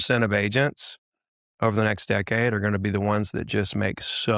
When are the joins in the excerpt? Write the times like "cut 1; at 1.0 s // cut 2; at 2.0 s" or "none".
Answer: none